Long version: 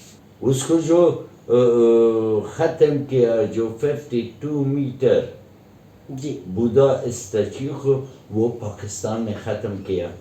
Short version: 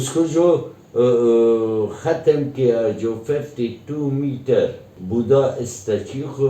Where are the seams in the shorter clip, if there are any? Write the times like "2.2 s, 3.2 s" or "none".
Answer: 4.9 s